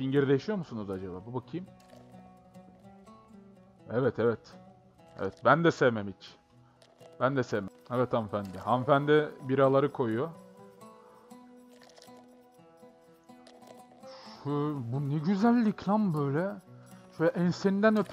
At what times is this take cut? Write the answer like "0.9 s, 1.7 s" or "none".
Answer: 7.8 s